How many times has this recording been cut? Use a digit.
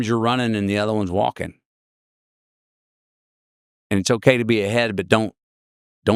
0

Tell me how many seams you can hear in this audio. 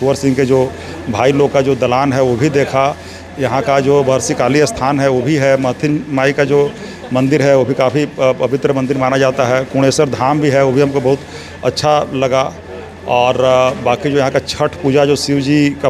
0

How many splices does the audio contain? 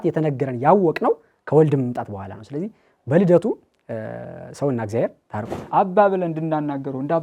1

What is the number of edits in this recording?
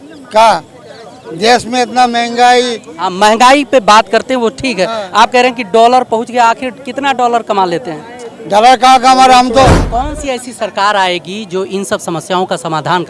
1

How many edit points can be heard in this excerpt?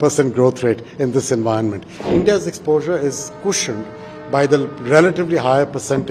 1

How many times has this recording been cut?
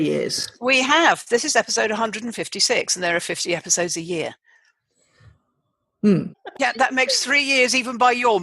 1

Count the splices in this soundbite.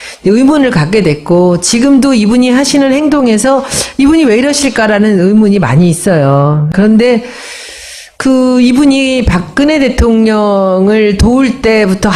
0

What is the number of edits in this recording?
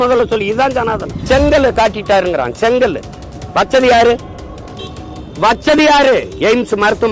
1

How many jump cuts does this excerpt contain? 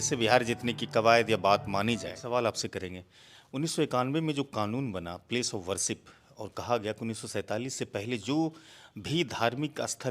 1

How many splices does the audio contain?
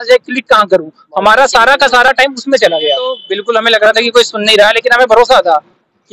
1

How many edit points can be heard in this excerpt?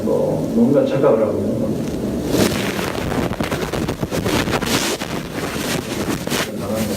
1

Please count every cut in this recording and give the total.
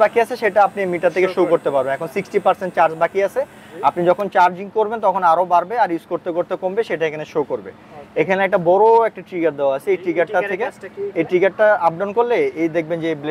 0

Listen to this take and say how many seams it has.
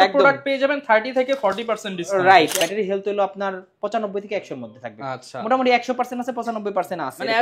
1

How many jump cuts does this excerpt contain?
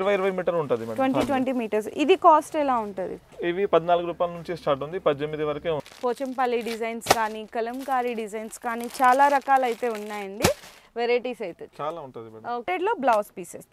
2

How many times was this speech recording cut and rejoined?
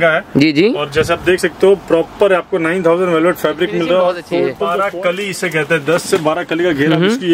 1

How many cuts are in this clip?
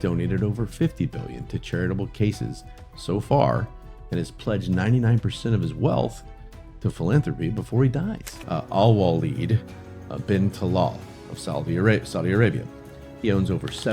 1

